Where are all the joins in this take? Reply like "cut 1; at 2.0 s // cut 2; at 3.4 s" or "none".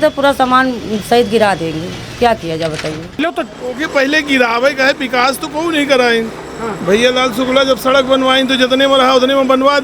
cut 1; at 3.2 s